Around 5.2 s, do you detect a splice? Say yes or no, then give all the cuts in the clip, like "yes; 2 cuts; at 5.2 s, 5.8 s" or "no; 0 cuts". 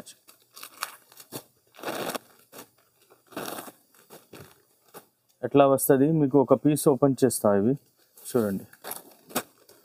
no; 0 cuts